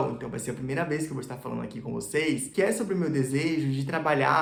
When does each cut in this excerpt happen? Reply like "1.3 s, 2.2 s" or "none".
none